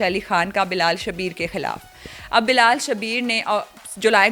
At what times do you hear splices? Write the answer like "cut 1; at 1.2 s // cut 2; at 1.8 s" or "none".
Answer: none